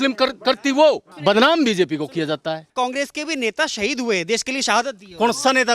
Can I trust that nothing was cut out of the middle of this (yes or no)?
no